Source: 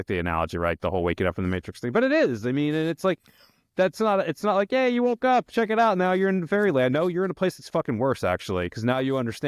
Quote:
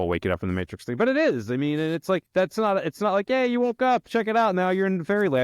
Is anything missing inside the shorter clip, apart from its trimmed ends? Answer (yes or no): yes